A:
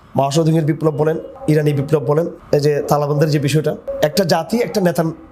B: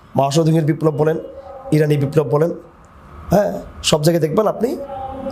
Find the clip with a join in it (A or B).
A